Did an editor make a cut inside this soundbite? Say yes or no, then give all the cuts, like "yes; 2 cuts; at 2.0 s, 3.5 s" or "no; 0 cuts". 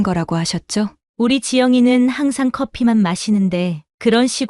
yes; 1 cut; at 1.0 s